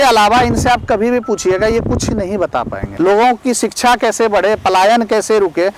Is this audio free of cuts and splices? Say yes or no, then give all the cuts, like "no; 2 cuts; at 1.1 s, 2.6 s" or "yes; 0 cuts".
no; 1 cut; at 2.8 s